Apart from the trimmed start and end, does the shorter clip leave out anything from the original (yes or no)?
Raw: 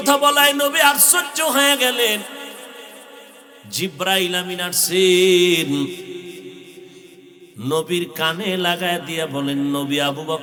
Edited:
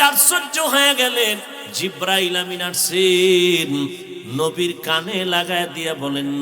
yes